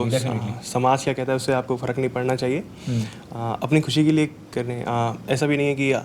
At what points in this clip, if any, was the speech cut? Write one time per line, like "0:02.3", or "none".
none